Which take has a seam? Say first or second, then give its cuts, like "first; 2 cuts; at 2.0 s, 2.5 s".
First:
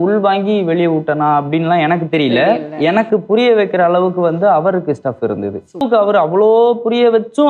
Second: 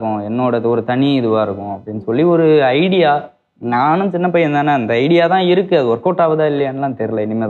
first; 1 cut; at 5.8 s